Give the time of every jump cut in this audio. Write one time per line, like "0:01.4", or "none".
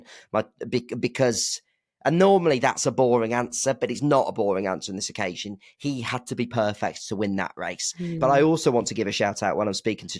0:08.2